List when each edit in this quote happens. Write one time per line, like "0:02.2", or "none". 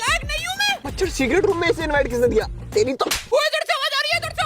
0:00.9
0:03.3